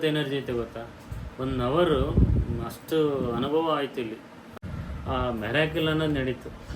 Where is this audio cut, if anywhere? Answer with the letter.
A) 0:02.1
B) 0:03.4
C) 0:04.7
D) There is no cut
C